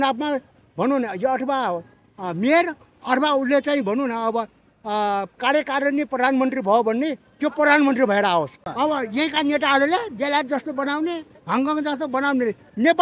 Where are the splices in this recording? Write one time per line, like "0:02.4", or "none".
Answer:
0:08.6